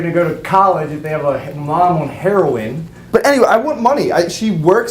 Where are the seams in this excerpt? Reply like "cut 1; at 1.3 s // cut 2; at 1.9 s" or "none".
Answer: cut 1; at 3.0 s